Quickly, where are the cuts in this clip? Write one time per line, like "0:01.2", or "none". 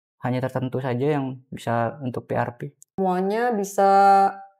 0:03.0